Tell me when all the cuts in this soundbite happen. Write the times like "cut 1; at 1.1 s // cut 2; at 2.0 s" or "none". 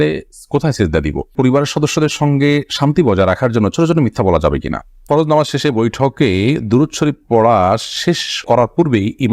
cut 1; at 1.3 s // cut 2; at 5.0 s